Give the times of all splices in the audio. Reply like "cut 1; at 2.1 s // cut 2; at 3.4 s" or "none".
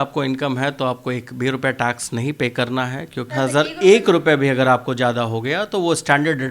cut 1; at 3.3 s